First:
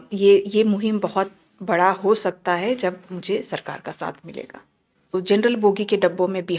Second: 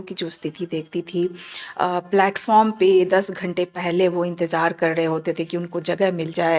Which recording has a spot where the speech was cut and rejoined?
first; 1 cut; at 5.1 s

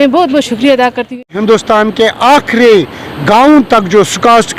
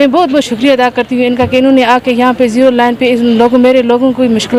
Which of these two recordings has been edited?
first; 1 cut; at 1.2 s

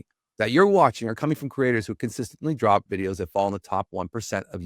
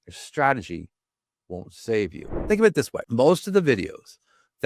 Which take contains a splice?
second; 2 cuts; at 2.3 s, 3.0 s

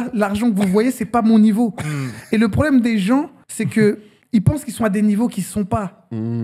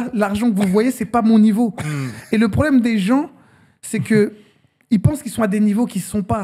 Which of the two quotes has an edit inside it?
first; 2 cuts; at 3.4 s, 4.1 s

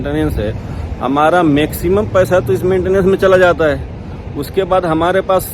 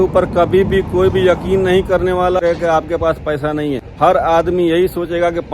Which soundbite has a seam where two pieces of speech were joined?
second; 2 cuts; at 2.4 s, 3.9 s

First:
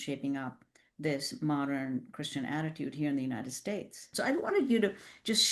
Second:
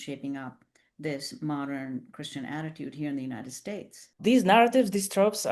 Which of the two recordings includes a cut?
first; 1 cut; at 4.0 s

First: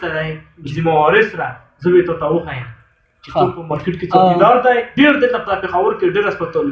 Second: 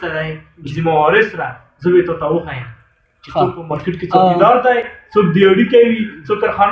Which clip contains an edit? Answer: first; 1 cut; at 4.9 s

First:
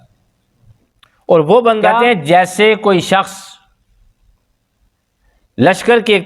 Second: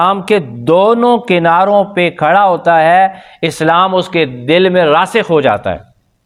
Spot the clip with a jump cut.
first; 1 cut; at 1.9 s

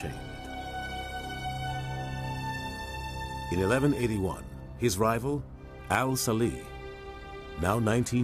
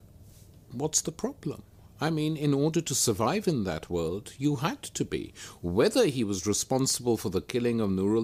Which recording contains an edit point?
first; 1 cut; at 1.2 s

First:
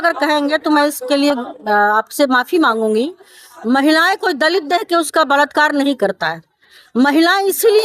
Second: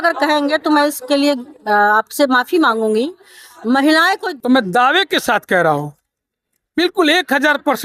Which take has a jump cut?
second; 1 cut; at 4.3 s

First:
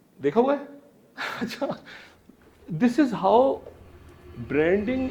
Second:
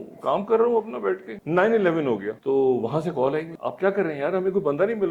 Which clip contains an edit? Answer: second; 3 cuts; at 1.3 s, 2.3 s, 3.6 s

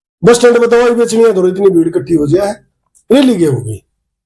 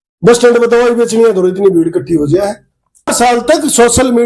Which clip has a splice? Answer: second; 1 cut; at 3.1 s

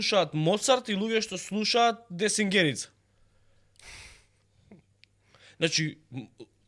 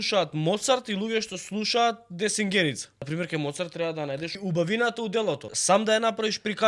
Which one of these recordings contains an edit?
second; 3 cuts; at 2.9 s, 4.4 s, 5.5 s

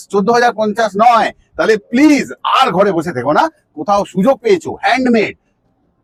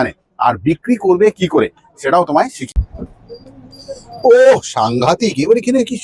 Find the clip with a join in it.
second; 1 cut; at 2.6 s

